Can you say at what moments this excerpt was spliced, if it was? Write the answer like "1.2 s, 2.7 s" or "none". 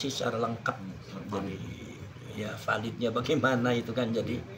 none